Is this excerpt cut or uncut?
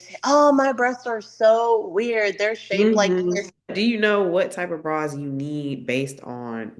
cut